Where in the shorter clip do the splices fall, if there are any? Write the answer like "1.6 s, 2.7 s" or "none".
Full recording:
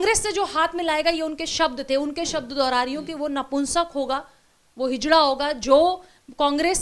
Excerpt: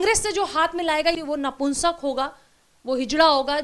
1.2 s